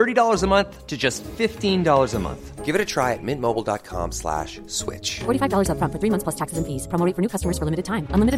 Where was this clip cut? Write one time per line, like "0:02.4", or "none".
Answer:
none